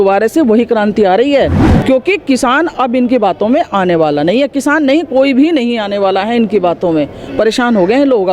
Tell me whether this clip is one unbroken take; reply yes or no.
no